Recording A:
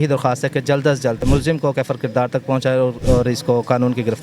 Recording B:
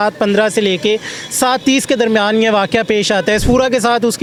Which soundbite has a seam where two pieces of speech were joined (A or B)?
A